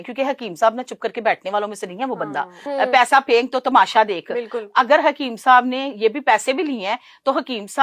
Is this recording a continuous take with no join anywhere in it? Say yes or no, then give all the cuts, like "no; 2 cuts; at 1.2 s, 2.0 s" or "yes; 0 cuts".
no; 1 cut; at 2.6 s